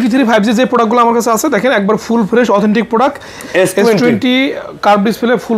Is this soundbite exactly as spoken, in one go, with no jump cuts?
no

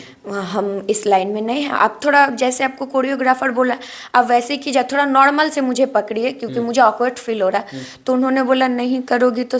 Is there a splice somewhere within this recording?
no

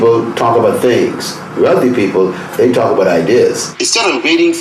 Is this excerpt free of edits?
no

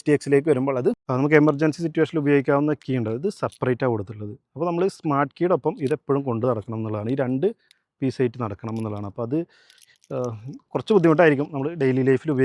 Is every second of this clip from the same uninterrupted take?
no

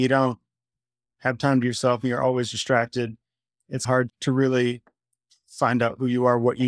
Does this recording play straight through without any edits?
yes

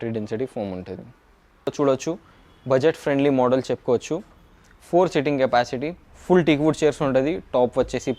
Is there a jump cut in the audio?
yes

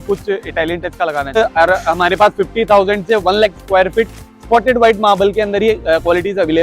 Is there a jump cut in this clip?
yes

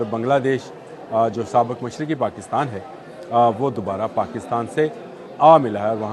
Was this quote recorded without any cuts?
yes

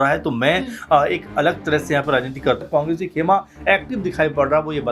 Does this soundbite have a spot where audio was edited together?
yes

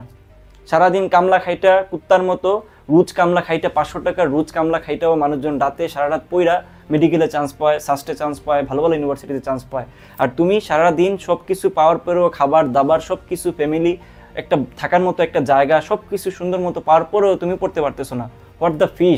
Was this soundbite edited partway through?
no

